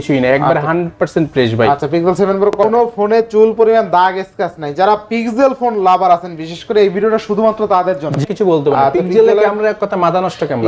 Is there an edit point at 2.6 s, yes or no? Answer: yes